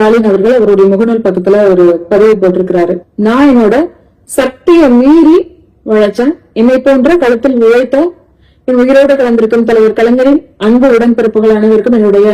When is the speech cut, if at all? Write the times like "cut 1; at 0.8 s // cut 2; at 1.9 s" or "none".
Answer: cut 1; at 3.0 s